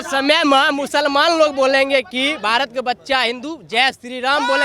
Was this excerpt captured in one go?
yes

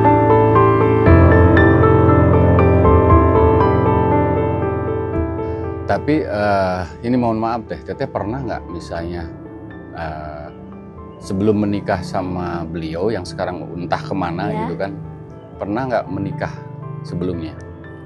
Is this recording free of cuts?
yes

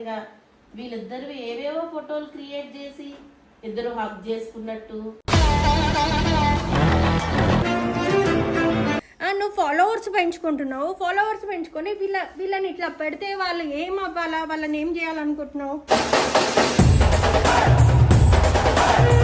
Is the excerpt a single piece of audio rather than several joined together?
no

